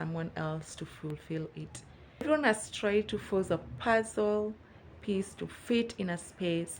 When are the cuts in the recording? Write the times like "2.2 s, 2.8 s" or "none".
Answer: 2.2 s

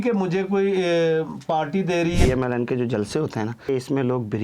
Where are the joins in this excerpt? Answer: 2.2 s, 3.7 s

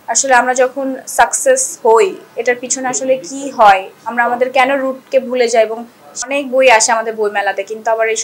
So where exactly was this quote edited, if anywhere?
6.2 s

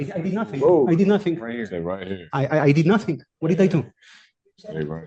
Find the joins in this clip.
none

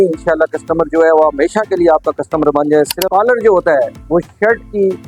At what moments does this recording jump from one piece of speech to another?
3.0 s

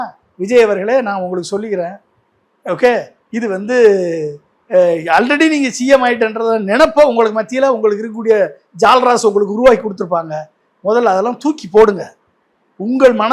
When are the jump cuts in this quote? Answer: none

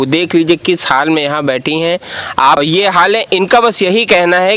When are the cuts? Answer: 2.6 s

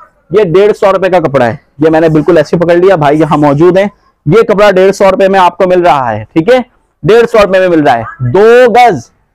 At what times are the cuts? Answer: none

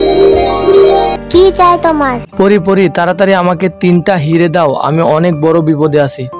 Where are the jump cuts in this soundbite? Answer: 1.2 s

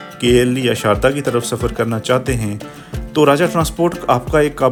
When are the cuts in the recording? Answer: none

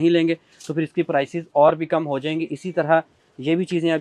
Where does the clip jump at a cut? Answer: none

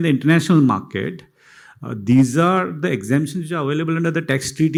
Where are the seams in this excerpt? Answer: none

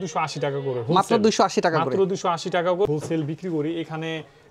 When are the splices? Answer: 2.9 s

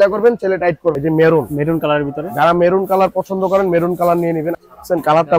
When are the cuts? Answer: 0.9 s, 4.5 s

